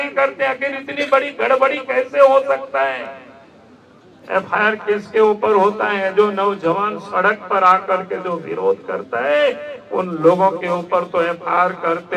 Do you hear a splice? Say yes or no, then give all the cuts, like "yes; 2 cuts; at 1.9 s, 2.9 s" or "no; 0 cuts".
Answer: no; 0 cuts